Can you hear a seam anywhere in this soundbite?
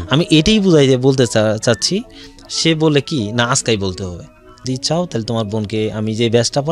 yes; 1 cut; at 4.6 s

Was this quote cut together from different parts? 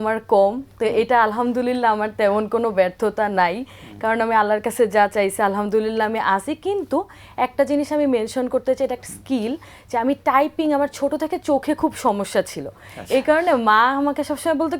no; 0 cuts

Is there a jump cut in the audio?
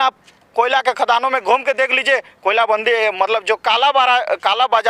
no; 0 cuts

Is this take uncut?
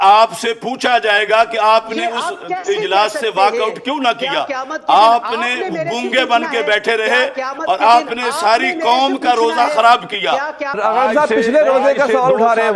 no; 1 cut; at 10.7 s

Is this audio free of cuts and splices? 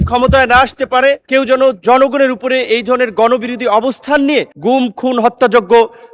no; 2 cuts; at 1.2 s, 4.5 s

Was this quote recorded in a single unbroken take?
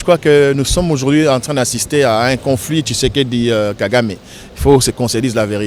yes; 0 cuts

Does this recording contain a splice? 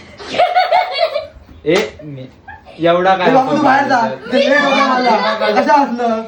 no; 0 cuts

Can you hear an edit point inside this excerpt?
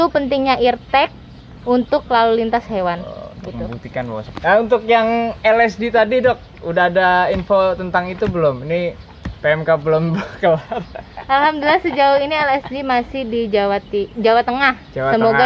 yes; 1 cut; at 4.3 s

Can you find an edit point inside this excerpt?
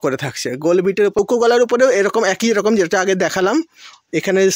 yes; 1 cut; at 1.2 s

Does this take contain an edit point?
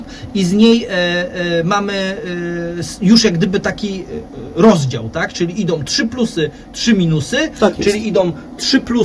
no; 0 cuts

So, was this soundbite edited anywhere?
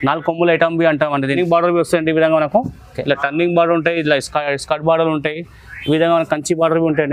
yes; 1 cut; at 1.3 s

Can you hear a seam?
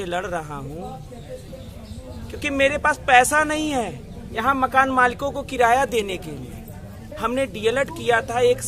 yes; 2 cuts; at 1.5 s, 7.1 s

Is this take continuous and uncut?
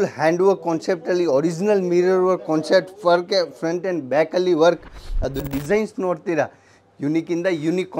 no; 1 cut; at 5.4 s

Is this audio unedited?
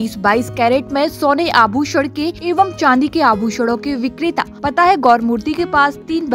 no; 2 cuts; at 2.4 s, 4.5 s

